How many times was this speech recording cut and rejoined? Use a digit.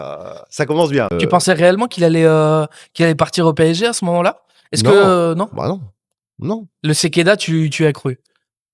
1